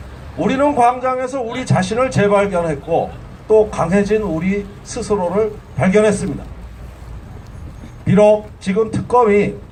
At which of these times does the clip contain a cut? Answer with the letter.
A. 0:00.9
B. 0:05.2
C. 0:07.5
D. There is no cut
D